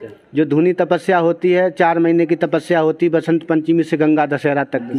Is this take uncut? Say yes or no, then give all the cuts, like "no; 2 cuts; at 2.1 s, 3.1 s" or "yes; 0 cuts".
yes; 0 cuts